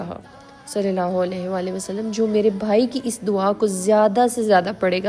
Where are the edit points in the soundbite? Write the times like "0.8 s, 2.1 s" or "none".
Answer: none